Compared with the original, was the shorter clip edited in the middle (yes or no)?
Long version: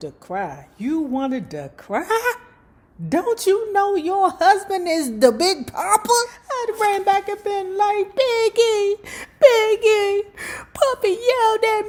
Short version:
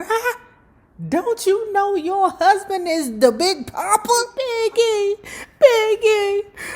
yes